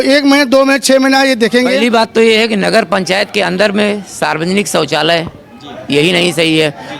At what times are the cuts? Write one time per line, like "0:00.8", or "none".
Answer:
0:01.8